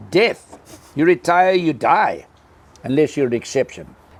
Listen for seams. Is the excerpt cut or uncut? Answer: uncut